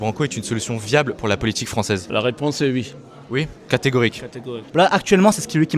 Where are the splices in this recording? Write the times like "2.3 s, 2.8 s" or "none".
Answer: 2.0 s, 4.6 s